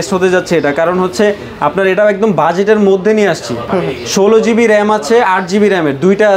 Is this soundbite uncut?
yes; 0 cuts

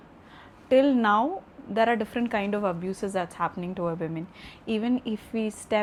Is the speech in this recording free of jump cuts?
yes; 0 cuts

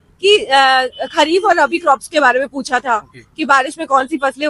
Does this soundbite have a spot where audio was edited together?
no; 0 cuts

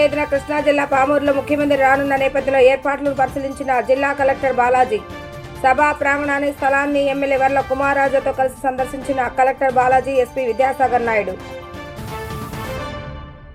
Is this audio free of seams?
yes; 0 cuts

